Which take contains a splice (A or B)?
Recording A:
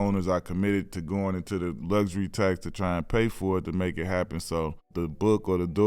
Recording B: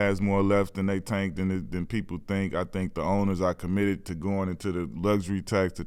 A